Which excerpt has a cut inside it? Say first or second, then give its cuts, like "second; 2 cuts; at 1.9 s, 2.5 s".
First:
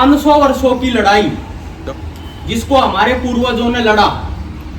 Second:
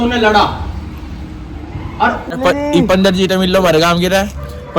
second; 1 cut; at 2.4 s